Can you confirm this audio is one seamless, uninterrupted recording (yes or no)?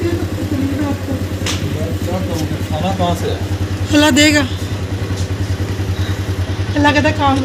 yes